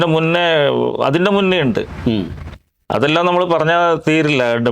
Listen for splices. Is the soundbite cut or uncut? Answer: uncut